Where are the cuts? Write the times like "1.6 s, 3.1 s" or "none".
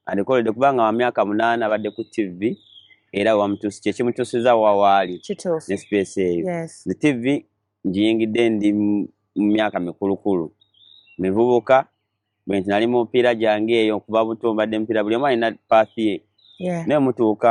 none